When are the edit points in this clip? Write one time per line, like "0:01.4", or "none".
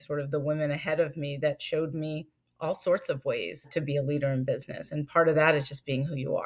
0:03.7